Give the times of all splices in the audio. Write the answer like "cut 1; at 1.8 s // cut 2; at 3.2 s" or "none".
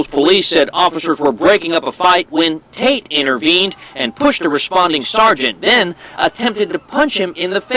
none